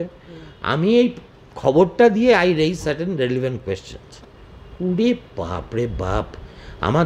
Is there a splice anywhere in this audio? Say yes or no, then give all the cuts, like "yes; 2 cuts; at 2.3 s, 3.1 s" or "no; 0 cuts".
no; 0 cuts